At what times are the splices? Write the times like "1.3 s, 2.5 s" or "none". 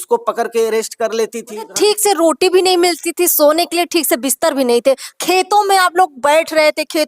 1.7 s